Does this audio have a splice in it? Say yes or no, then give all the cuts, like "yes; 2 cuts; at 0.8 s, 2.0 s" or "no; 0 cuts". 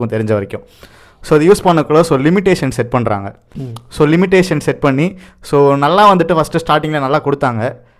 no; 0 cuts